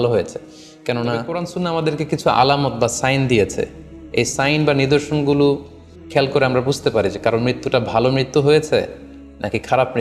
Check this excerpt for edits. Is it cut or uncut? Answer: cut